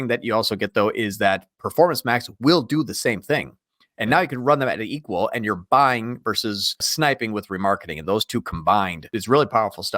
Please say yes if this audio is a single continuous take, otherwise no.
no